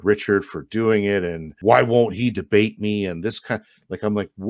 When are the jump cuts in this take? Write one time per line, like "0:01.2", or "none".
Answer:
0:01.5

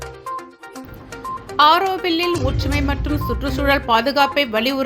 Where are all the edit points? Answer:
0:01.5

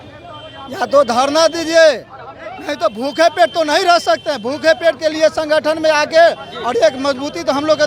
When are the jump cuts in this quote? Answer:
none

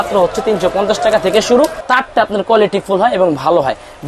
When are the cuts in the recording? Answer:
0:01.8

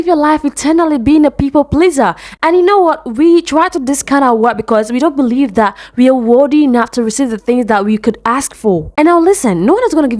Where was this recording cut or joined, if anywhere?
none

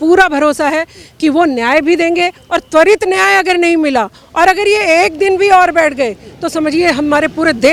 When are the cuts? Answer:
none

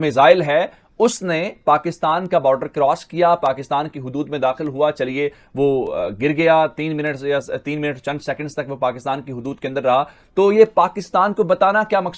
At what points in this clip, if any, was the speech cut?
none

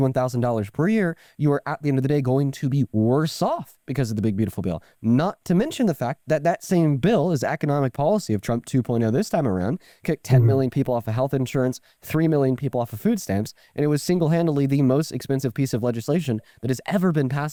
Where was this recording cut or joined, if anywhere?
none

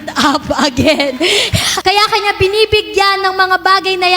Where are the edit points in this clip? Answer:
0:01.7

